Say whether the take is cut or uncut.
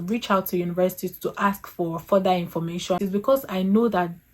cut